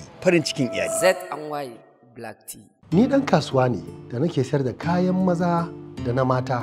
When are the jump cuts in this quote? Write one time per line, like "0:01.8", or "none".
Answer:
0:02.6